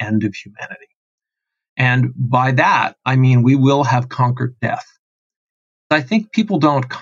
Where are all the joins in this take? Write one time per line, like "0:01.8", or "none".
0:05.9